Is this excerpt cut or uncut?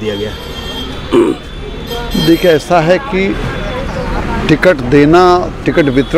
uncut